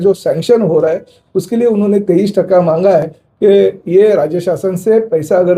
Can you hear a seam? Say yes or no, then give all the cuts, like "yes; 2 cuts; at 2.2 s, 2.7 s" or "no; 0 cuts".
no; 0 cuts